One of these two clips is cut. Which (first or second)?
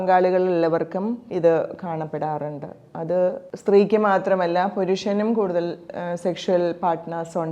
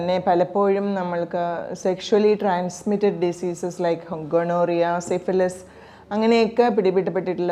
first